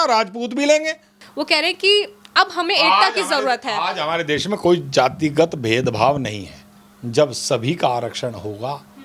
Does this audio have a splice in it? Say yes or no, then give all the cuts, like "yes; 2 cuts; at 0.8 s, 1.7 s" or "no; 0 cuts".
yes; 1 cut; at 1.2 s